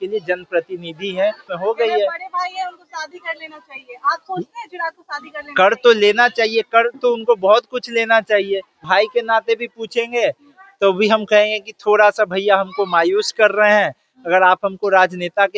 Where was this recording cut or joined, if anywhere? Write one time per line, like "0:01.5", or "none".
0:01.5
0:08.8